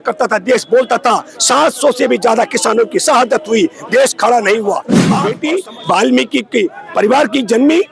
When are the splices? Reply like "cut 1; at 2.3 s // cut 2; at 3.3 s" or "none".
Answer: cut 1; at 5.1 s